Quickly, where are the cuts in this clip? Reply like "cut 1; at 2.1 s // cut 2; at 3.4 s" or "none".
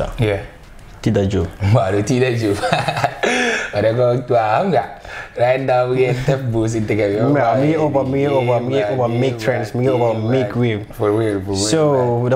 cut 1; at 1.4 s